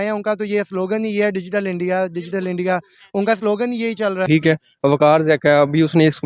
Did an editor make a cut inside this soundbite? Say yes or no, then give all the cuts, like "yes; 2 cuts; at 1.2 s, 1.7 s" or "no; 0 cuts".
yes; 1 cut; at 4.2 s